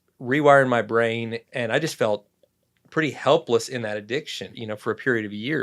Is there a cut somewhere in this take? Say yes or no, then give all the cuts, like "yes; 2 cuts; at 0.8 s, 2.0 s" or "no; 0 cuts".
yes; 2 cuts; at 1.4 s, 4.6 s